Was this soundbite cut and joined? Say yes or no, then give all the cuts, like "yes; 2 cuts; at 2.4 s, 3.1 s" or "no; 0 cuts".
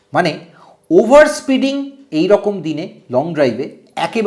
no; 0 cuts